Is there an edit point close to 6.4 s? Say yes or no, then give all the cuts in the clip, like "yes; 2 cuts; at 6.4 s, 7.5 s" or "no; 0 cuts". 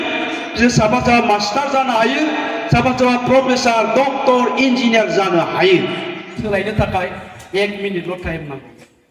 yes; 1 cut; at 6.4 s